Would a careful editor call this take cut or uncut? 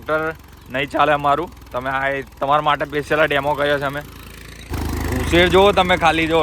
cut